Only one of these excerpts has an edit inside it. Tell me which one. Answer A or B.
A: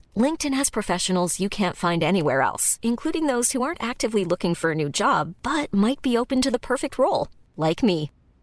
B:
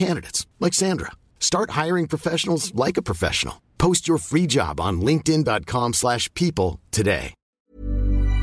B